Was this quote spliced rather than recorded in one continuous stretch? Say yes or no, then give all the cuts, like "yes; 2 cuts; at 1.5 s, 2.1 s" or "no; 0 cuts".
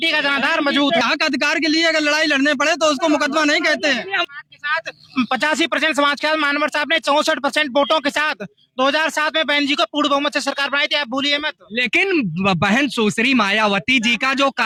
no; 0 cuts